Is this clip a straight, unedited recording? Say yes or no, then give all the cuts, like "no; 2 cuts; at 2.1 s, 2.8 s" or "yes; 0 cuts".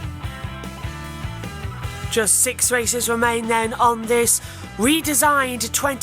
no; 1 cut; at 1.5 s